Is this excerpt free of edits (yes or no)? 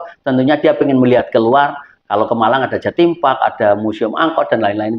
yes